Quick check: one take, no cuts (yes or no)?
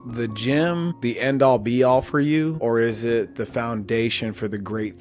yes